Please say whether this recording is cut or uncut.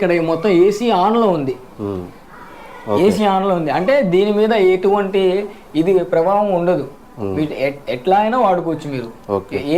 uncut